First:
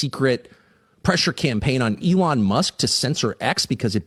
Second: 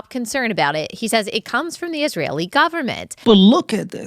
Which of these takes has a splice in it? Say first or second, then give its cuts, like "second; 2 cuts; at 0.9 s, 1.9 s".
second; 1 cut; at 3.1 s